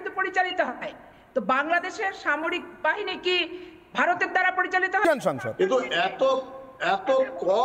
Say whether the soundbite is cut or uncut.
cut